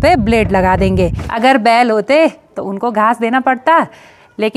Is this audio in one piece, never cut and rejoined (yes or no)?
no